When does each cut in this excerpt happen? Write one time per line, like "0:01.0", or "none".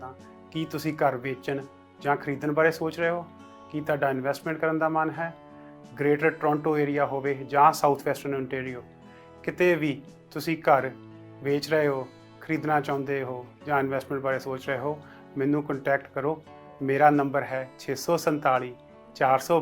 0:04.4